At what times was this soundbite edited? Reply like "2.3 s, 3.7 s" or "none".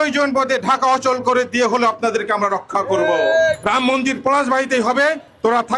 3.6 s